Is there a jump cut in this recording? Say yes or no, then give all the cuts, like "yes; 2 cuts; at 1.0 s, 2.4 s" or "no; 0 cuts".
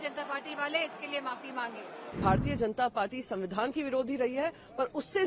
yes; 1 cut; at 2.0 s